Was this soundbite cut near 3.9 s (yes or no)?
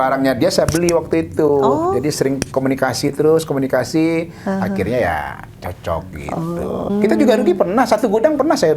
no